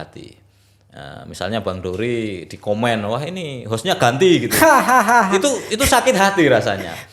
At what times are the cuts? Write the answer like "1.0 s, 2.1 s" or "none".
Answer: none